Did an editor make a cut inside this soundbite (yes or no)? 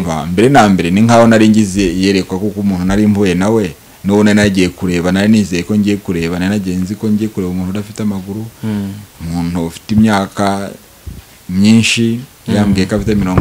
no